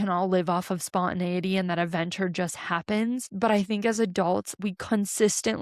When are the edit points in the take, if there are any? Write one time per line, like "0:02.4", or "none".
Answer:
0:03.3
0:04.5